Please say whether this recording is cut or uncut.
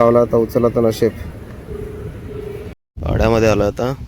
cut